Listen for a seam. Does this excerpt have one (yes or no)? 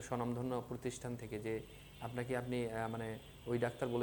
no